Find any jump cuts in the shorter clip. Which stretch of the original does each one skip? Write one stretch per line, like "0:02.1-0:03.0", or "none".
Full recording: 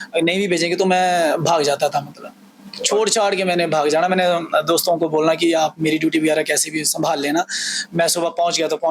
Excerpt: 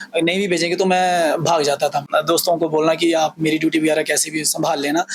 0:02.1-0:04.5